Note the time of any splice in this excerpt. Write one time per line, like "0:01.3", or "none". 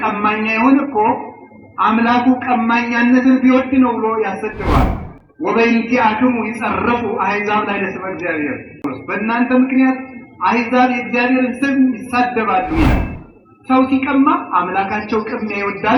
0:08.8